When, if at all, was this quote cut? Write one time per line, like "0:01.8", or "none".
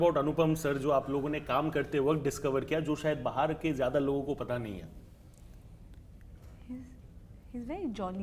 none